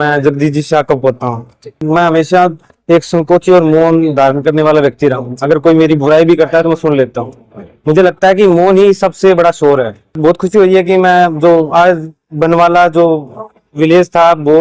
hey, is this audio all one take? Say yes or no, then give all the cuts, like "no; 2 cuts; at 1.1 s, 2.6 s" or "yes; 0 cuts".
no; 2 cuts; at 1.8 s, 10.2 s